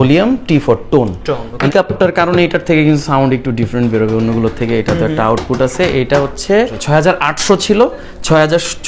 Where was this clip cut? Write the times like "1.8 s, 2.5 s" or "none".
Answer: 1.7 s, 6.8 s